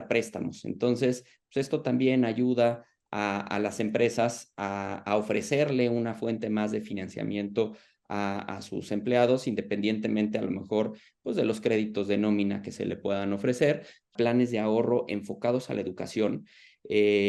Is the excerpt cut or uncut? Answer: cut